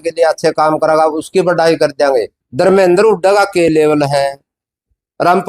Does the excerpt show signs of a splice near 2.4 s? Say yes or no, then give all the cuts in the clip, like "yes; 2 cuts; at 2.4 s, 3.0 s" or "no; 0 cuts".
yes; 1 cut; at 2.4 s